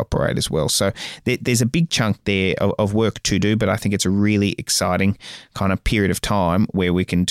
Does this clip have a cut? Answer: no; 0 cuts

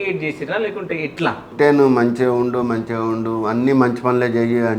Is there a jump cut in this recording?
yes; 1 cut; at 1.5 s

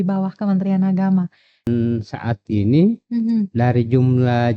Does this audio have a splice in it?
yes; 1 cut; at 1.6 s

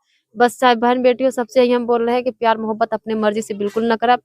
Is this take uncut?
yes; 0 cuts

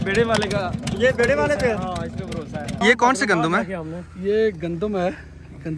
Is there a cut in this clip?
no; 0 cuts

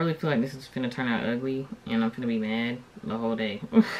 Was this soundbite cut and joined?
no; 0 cuts

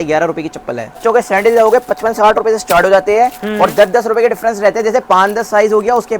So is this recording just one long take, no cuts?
no; 1 cut; at 1.0 s

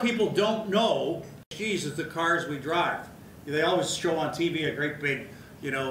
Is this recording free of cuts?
no; 1 cut; at 1.5 s

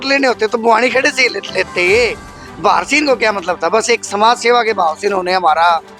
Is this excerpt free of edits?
yes; 0 cuts

